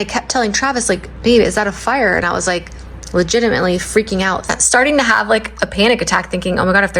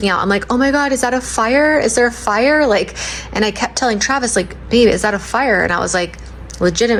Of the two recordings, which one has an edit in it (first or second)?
first